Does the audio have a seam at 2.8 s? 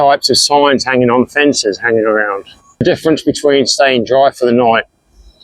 yes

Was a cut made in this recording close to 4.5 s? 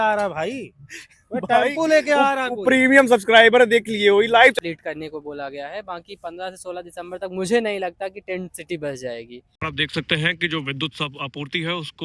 yes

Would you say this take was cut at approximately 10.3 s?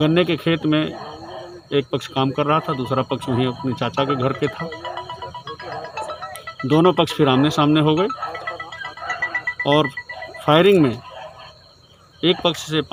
no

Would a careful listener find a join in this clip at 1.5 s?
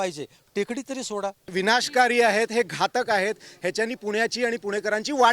yes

